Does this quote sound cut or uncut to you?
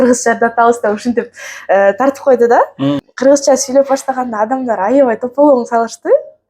cut